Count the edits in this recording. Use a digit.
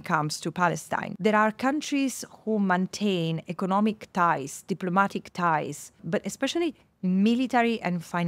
2